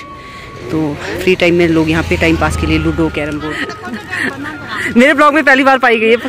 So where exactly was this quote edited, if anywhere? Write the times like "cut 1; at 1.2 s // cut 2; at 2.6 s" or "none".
cut 1; at 3.6 s